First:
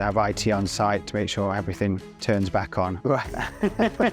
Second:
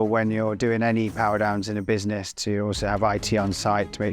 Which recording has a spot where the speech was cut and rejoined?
first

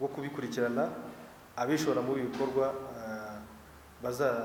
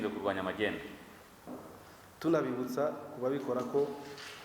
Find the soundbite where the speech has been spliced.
second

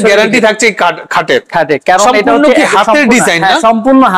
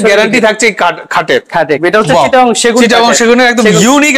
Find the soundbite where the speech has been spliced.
second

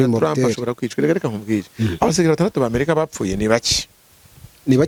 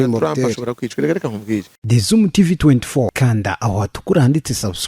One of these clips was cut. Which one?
second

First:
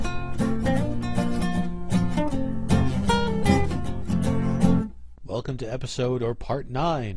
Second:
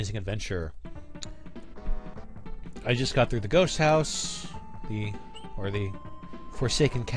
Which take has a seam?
first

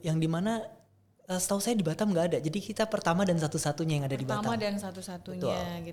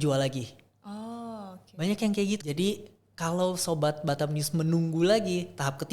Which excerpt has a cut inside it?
second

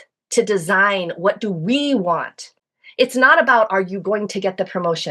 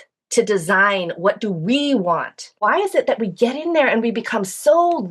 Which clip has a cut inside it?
second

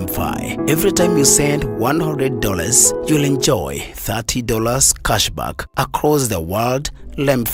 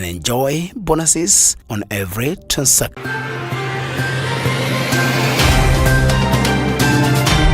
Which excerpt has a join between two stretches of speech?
second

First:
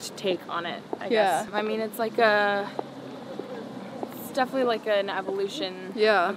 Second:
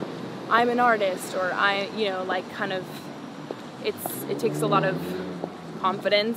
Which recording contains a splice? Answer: first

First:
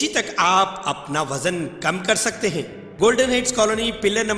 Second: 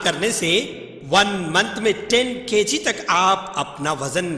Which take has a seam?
first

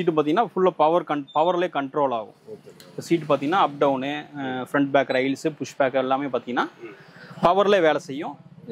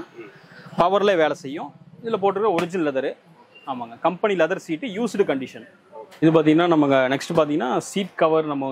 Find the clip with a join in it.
second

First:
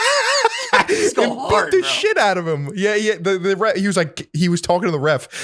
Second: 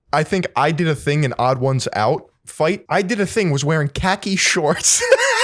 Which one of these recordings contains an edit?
second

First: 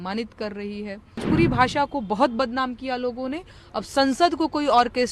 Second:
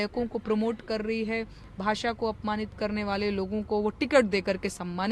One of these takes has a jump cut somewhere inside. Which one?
first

